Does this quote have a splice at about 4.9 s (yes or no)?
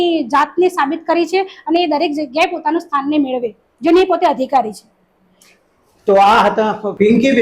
no